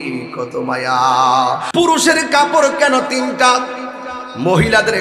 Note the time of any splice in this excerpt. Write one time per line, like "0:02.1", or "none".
0:01.7